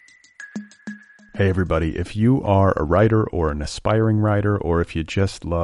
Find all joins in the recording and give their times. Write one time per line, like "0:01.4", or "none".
0:00.9